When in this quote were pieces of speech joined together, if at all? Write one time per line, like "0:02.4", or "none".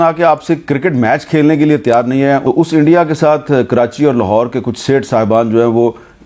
0:02.4